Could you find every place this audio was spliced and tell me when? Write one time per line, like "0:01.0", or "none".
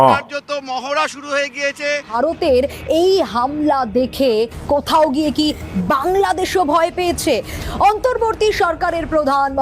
0:02.1